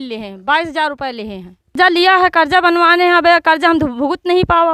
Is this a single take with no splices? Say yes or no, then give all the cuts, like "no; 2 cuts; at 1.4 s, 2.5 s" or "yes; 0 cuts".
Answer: no; 1 cut; at 1.7 s